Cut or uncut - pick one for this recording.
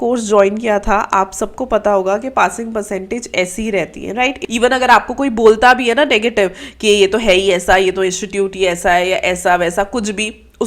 cut